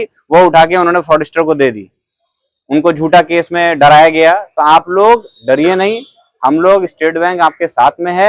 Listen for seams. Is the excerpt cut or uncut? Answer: uncut